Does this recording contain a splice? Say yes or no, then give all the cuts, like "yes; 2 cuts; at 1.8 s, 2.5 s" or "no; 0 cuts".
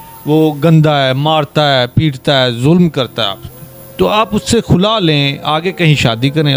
no; 0 cuts